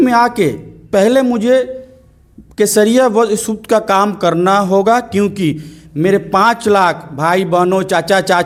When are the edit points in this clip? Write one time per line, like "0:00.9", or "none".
none